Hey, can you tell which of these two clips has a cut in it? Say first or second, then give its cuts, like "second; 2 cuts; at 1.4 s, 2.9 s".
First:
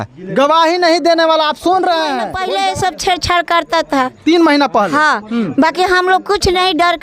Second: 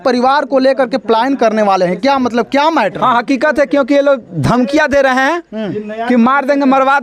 first; 1 cut; at 2.3 s